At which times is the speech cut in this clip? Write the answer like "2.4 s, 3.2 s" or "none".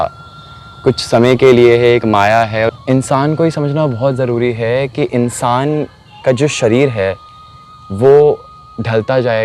2.8 s